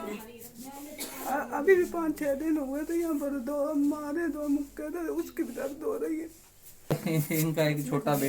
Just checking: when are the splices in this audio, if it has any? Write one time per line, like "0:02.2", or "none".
0:06.9